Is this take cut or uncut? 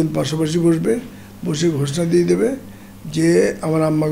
uncut